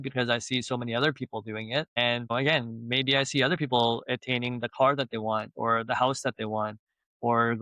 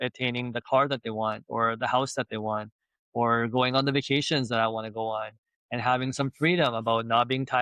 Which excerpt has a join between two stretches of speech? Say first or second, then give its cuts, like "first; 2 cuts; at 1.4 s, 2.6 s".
first; 1 cut; at 2.3 s